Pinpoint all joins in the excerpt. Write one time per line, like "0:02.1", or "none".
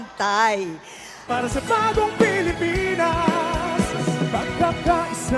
0:01.3